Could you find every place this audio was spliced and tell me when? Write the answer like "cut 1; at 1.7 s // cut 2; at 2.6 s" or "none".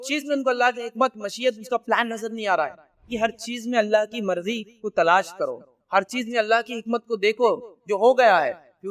cut 1; at 3.1 s